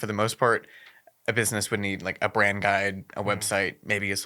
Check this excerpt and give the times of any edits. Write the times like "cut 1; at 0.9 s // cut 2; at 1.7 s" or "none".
none